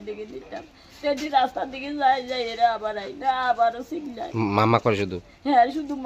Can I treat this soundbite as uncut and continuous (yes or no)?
yes